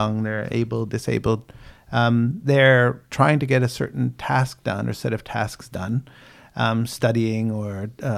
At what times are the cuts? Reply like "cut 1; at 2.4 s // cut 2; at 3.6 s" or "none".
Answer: none

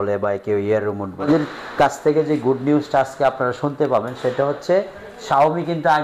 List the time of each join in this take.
cut 1; at 1.2 s

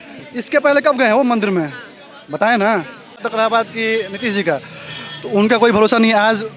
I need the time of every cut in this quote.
cut 1; at 3.3 s

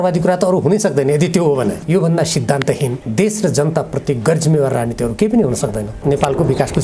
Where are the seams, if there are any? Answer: cut 1; at 1.8 s // cut 2; at 3.0 s // cut 3; at 6.0 s

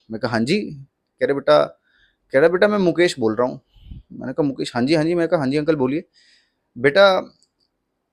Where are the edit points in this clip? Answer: none

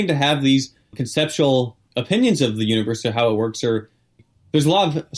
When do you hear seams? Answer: cut 1; at 1.0 s // cut 2; at 1.8 s // cut 3; at 4.2 s

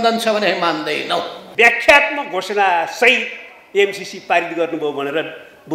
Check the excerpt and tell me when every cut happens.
cut 1; at 1.4 s

